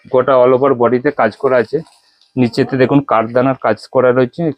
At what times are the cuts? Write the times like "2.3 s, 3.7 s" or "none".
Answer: none